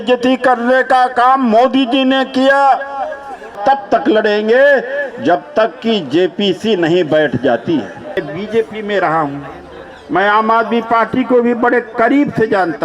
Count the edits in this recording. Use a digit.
2